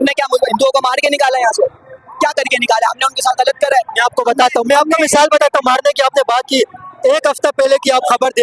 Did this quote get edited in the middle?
no; 0 cuts

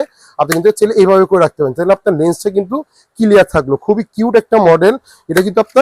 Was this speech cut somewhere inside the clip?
no; 0 cuts

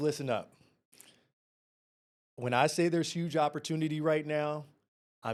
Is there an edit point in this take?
no; 0 cuts

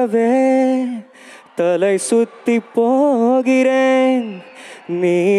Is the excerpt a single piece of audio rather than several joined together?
yes; 0 cuts

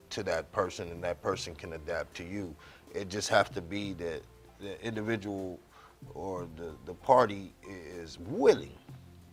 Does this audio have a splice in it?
no; 0 cuts

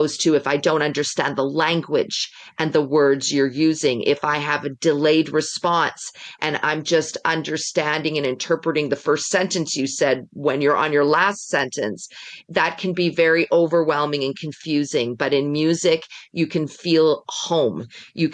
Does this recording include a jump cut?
no; 0 cuts

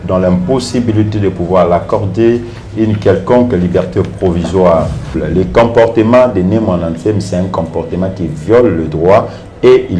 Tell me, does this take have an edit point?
yes; 1 cut; at 5.2 s

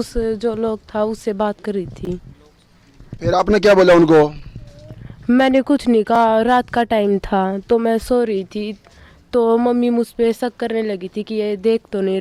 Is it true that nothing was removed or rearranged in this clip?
yes; 0 cuts

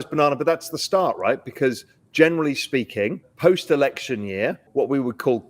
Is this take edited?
yes; 2 cuts; at 3.2 s, 4.6 s

